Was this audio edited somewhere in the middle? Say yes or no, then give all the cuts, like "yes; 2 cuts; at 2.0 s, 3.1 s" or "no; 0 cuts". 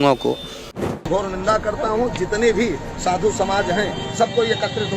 yes; 1 cut; at 0.9 s